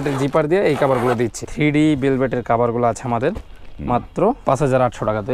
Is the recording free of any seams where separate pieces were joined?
no; 2 cuts; at 1.4 s, 4.4 s

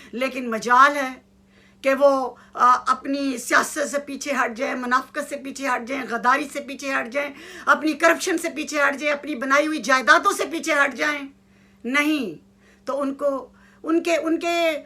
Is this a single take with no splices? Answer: yes; 0 cuts

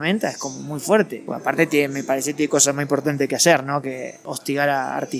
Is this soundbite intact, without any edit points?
no; 2 cuts; at 1.2 s, 4.2 s

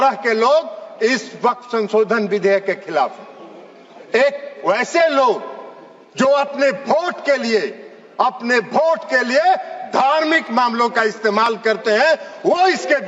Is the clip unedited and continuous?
yes; 0 cuts

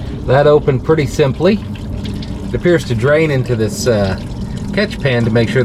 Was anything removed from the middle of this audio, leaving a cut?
no; 0 cuts

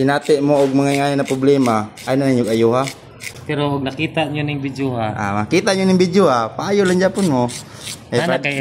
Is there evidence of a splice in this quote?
no; 0 cuts

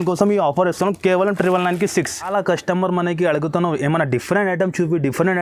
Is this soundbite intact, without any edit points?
no; 1 cut; at 2.3 s

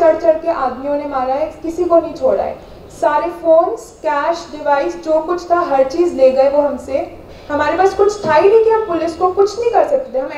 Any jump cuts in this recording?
no; 0 cuts

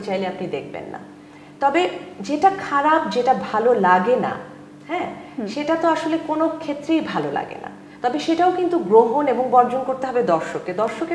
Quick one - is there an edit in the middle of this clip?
no; 0 cuts

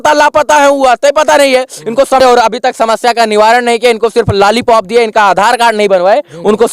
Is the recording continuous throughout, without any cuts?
no; 1 cut; at 2.2 s

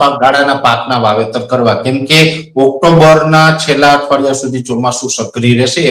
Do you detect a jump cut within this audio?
no; 0 cuts

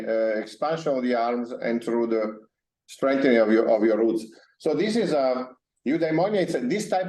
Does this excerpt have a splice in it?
no; 0 cuts

